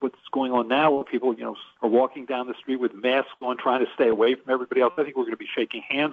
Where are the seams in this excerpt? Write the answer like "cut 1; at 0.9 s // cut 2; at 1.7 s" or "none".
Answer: cut 1; at 1.6 s

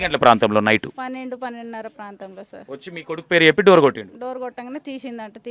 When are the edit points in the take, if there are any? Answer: cut 1; at 0.9 s // cut 2; at 2.6 s

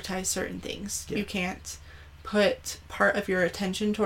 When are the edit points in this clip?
none

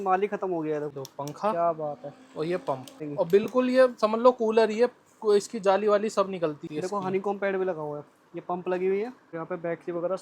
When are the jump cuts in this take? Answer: cut 1; at 0.9 s // cut 2; at 3.0 s // cut 3; at 6.6 s // cut 4; at 9.3 s

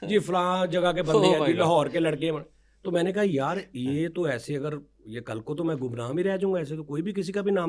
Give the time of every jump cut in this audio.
none

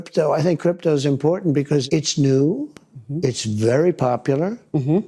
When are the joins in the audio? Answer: cut 1; at 1.8 s

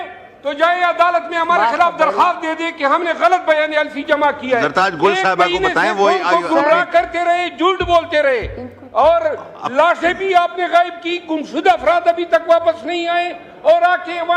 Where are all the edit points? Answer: none

